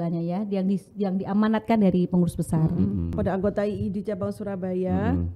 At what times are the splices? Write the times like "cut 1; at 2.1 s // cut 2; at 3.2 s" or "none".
cut 1; at 3.1 s

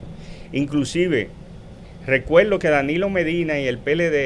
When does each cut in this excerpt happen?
none

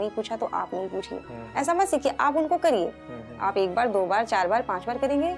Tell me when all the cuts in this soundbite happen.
none

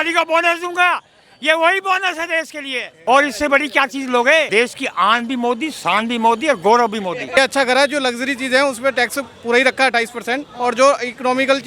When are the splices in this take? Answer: cut 1; at 2.8 s // cut 2; at 4.5 s // cut 3; at 7.4 s

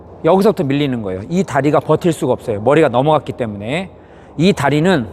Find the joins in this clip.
none

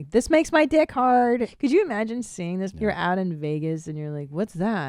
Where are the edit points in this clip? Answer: cut 1; at 1.5 s // cut 2; at 2.7 s

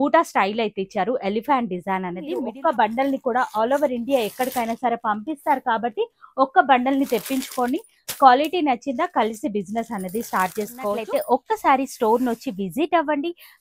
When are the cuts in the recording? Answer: cut 1; at 2.5 s // cut 2; at 11.0 s

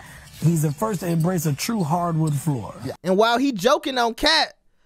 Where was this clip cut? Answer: cut 1; at 2.9 s

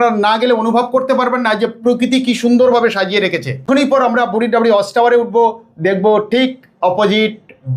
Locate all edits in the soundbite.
cut 1; at 3.6 s

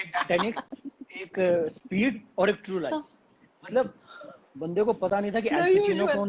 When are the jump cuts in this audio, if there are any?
none

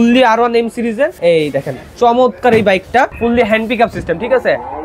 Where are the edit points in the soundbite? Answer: cut 1; at 1.2 s // cut 2; at 3.1 s

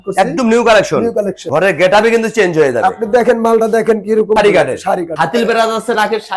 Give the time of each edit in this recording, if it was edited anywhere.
cut 1; at 1.4 s // cut 2; at 4.4 s // cut 3; at 5.1 s

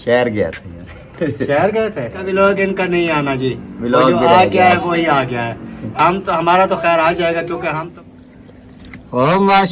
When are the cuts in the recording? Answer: cut 1; at 2.2 s // cut 2; at 8.0 s

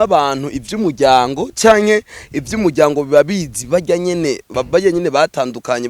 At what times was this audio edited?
cut 1; at 4.5 s

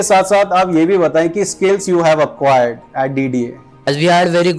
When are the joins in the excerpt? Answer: cut 1; at 3.7 s

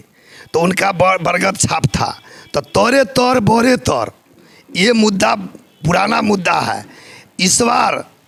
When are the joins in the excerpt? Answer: none

